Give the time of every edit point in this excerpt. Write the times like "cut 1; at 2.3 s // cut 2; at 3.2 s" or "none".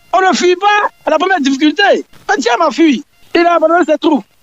cut 1; at 2.1 s // cut 2; at 3.1 s